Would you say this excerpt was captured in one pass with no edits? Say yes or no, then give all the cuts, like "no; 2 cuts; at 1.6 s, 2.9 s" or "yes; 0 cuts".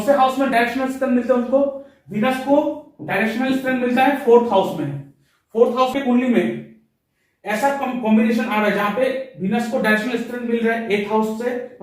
no; 1 cut; at 5.9 s